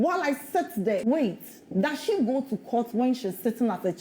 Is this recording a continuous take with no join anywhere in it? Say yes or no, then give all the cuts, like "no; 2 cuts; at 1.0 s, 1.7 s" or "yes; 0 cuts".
no; 1 cut; at 1.0 s